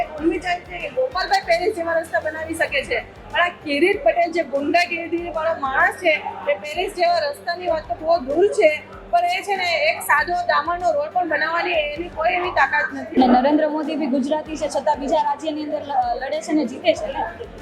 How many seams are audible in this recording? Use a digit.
1